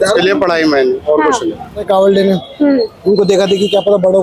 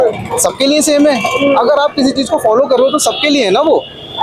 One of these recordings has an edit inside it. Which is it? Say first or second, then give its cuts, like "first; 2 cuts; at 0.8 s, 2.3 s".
first; 1 cut; at 1.8 s